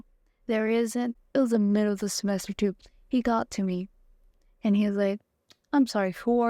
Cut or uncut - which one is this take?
cut